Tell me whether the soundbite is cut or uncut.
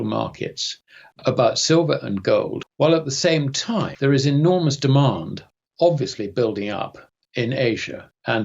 cut